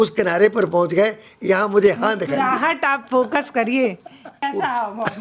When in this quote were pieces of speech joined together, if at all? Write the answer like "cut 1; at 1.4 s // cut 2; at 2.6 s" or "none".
cut 1; at 4.3 s